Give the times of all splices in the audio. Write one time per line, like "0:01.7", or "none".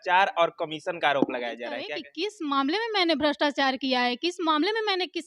0:02.0